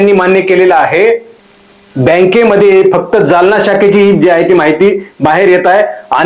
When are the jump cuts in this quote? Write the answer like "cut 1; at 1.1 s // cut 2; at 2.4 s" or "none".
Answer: cut 1; at 1.3 s